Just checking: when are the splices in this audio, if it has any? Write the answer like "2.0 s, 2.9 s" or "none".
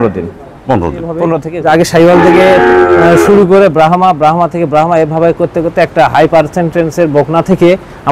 1.4 s